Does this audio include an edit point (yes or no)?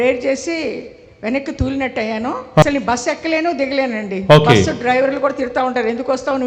yes